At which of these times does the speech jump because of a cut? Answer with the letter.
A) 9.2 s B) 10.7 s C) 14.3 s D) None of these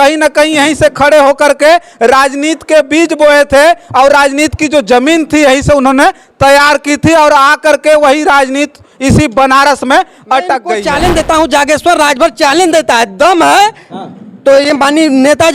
B